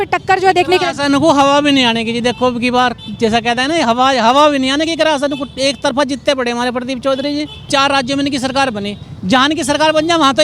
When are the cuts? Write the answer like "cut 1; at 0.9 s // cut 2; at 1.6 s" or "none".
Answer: cut 1; at 7.6 s